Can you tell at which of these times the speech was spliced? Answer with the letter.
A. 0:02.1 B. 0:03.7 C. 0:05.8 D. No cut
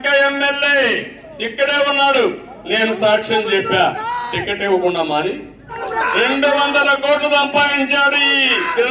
C